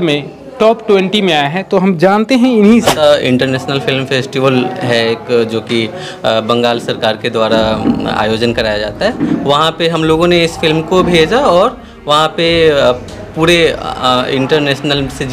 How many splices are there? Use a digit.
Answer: 1